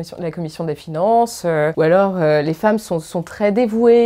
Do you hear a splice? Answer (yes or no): yes